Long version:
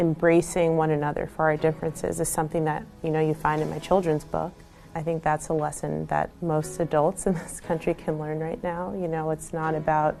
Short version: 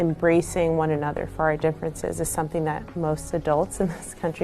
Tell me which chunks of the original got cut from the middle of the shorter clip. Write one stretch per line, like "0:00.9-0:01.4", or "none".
0:02.9-0:06.4